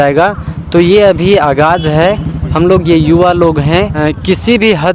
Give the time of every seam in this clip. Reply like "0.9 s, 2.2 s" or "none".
4.0 s